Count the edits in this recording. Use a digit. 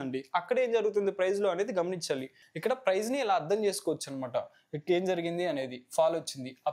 1